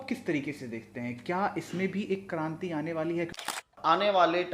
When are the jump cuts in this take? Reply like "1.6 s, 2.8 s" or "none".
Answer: 3.5 s